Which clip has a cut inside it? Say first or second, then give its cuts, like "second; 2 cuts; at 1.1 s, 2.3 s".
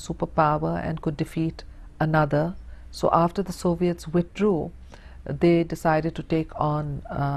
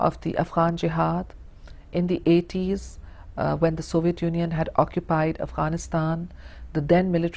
second; 1 cut; at 2.1 s